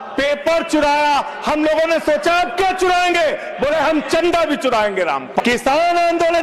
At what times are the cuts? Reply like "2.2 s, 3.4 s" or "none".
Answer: 5.3 s